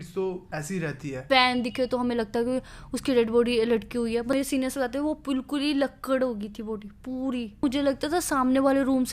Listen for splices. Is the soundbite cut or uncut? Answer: cut